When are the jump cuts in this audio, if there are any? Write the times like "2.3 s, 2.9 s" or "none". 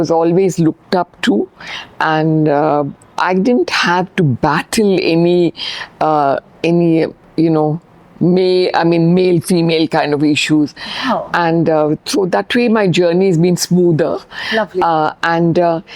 none